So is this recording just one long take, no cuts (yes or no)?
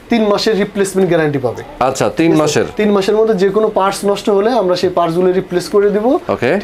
yes